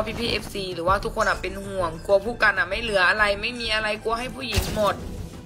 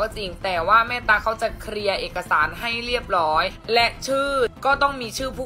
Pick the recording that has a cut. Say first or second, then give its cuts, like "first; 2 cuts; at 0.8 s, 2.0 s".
second; 2 cuts; at 3.6 s, 4.6 s